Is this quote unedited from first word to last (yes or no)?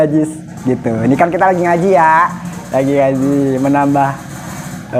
yes